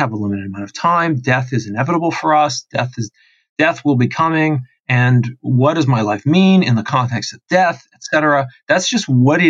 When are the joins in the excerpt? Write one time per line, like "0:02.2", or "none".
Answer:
none